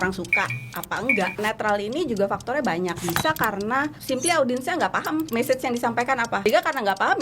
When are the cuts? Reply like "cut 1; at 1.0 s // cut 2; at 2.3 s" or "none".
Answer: cut 1; at 1.4 s // cut 2; at 3.0 s // cut 3; at 4.0 s // cut 4; at 5.3 s // cut 5; at 6.4 s